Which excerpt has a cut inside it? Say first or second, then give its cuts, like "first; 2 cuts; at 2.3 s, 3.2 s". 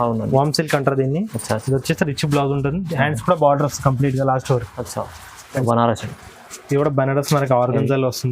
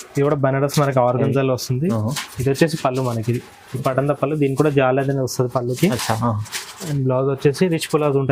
first; 1 cut; at 5.6 s